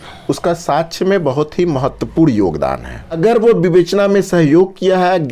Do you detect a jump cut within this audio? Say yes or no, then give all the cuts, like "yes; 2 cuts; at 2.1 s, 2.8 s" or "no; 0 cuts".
yes; 1 cut; at 3.1 s